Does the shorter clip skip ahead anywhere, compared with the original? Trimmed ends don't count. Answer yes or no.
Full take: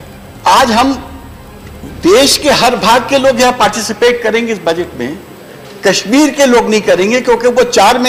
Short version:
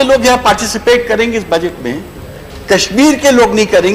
no